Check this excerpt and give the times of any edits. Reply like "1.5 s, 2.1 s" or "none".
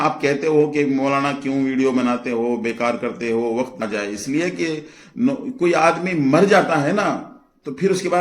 3.8 s